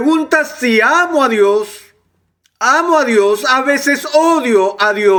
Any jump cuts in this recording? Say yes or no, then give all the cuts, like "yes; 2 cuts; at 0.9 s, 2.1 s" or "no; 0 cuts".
no; 0 cuts